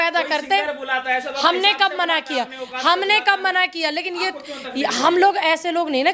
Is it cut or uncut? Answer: uncut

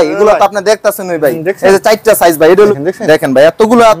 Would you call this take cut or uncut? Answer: cut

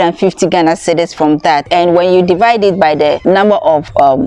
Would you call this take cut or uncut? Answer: cut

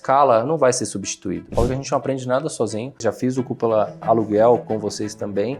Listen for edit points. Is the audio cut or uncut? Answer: cut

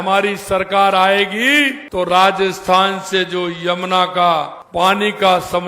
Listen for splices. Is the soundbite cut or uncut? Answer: cut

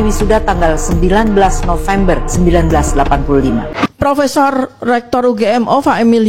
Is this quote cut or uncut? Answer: cut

